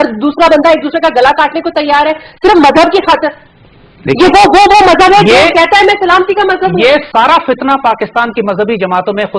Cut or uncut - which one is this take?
uncut